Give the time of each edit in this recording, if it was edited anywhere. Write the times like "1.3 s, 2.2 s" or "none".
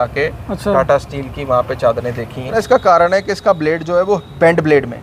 2.6 s